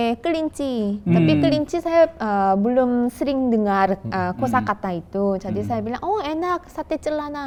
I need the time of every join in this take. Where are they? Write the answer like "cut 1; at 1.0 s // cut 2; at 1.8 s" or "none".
none